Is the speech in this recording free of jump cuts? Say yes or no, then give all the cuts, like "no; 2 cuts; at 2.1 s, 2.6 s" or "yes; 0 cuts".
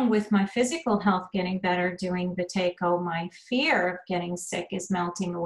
yes; 0 cuts